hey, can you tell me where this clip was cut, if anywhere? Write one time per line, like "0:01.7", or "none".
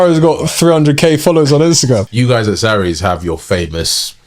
0:02.1